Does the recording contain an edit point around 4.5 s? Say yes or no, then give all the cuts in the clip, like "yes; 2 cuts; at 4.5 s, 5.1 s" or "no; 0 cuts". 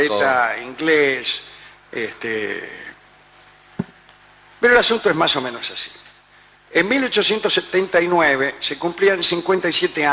no; 1 cut; at 7.2 s